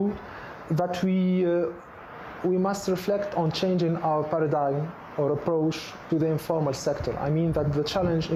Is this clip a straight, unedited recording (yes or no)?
yes